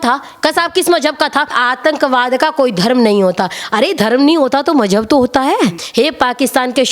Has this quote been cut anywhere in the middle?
yes; 2 cuts; at 1.6 s, 5.8 s

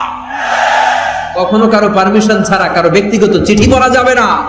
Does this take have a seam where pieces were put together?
no; 0 cuts

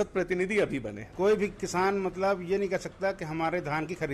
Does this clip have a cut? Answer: yes; 1 cut; at 1.0 s

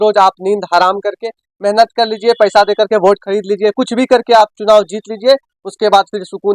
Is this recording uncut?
yes; 0 cuts

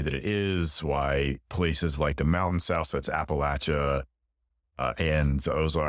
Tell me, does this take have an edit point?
no; 0 cuts

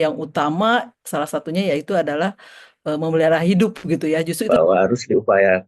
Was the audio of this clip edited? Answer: yes; 1 cut; at 4.4 s

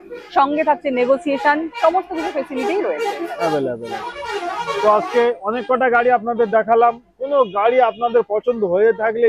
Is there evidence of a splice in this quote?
no; 0 cuts

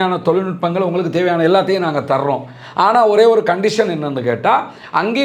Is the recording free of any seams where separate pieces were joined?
yes; 0 cuts

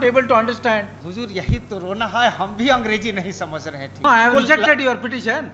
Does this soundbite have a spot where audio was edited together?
yes; 2 cuts; at 1.0 s, 4.0 s

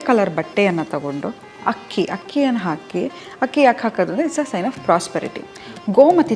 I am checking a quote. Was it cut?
no; 0 cuts

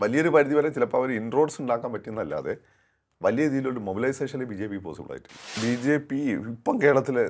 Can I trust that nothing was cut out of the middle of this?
no; 1 cut; at 5.4 s

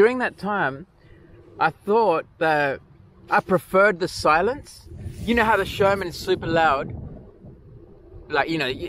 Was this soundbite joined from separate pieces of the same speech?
no; 0 cuts

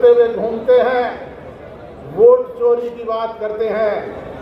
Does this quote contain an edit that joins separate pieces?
no; 0 cuts

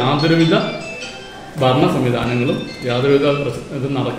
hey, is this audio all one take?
yes; 0 cuts

